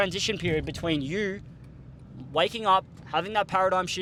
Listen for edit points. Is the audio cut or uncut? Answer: uncut